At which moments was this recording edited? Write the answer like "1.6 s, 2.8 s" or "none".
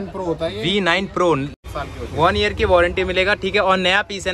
1.5 s